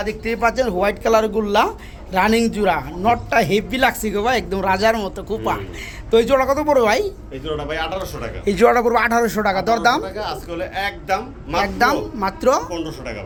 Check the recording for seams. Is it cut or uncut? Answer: uncut